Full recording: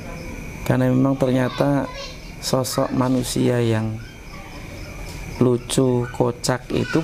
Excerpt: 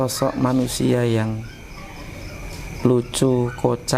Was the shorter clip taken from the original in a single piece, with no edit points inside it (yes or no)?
yes